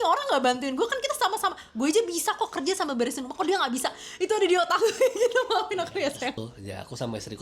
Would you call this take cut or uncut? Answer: cut